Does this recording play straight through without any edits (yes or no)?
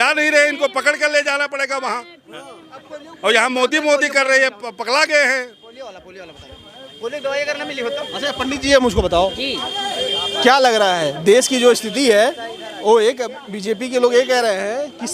yes